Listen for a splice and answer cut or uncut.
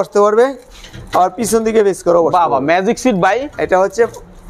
uncut